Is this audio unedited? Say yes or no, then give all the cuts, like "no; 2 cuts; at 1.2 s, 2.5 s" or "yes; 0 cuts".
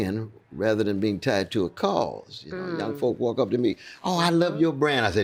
yes; 0 cuts